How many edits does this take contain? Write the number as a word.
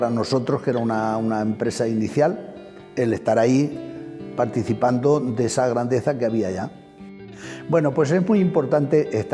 one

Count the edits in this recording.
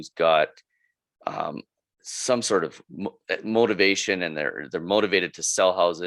zero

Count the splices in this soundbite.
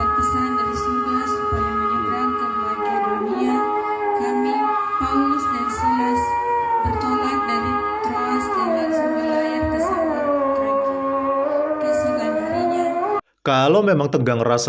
one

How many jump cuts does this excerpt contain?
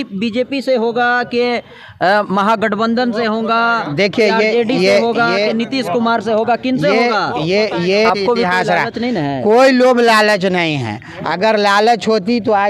one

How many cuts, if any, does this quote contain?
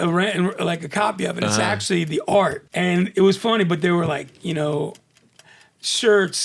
one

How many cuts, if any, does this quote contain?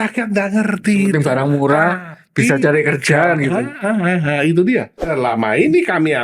one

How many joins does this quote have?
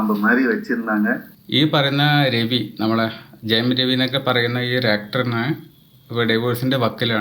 one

